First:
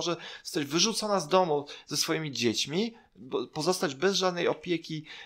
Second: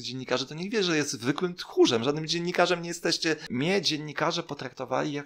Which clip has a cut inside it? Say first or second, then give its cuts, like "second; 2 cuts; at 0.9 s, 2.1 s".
second; 1 cut; at 3.5 s